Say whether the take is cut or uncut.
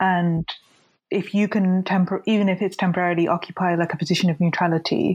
uncut